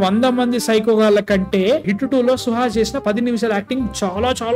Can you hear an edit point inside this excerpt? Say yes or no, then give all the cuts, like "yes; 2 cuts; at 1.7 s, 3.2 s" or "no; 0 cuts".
no; 0 cuts